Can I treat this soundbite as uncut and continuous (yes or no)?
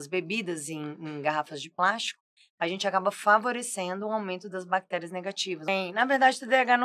no